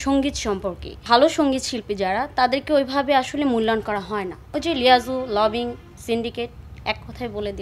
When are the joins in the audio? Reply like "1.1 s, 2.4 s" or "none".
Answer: 1.0 s, 4.4 s